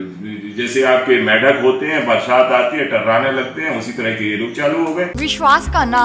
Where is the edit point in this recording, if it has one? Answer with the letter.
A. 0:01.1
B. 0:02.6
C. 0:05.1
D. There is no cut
C